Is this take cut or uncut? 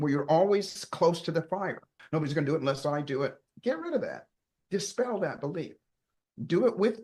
cut